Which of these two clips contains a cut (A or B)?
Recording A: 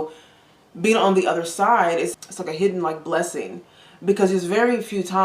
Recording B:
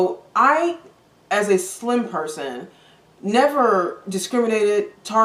A